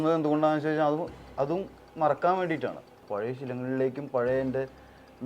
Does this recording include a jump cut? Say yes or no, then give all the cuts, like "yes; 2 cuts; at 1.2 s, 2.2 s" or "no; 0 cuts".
yes; 1 cut; at 3.1 s